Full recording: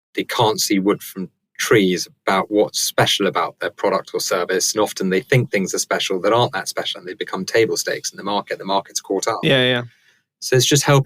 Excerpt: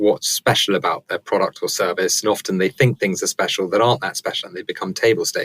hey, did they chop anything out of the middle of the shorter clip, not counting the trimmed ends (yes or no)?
no